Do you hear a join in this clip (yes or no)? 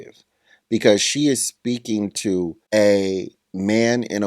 yes